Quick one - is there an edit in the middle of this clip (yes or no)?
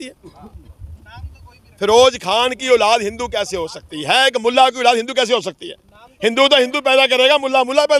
no